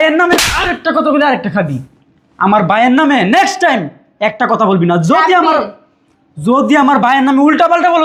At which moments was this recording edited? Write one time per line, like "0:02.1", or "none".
none